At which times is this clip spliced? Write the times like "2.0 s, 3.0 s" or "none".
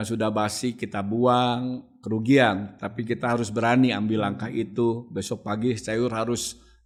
none

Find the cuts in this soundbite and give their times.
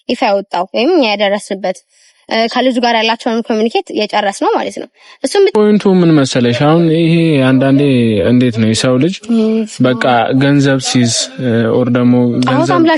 5.5 s

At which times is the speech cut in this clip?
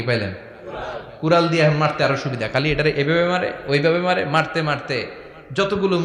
none

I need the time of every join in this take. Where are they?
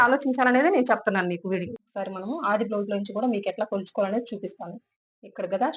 1.8 s

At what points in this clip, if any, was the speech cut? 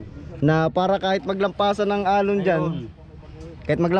none

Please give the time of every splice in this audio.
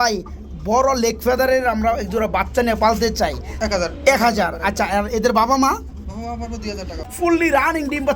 3.5 s, 7.0 s

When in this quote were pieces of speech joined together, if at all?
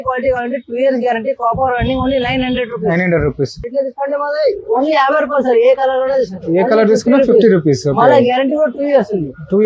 3.7 s

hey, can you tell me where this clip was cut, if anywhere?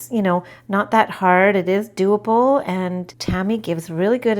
3.1 s

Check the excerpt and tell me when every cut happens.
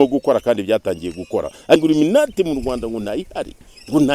1.8 s

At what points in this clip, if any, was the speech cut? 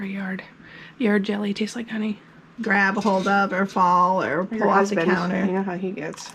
2.4 s

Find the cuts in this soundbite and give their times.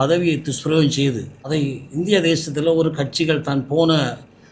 1.4 s

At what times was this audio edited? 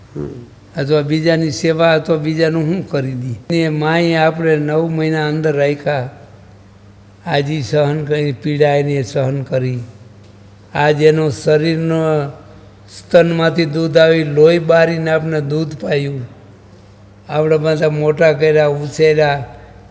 3.5 s

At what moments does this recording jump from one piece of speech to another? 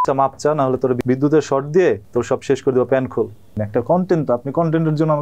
1.0 s, 2.0 s, 3.6 s

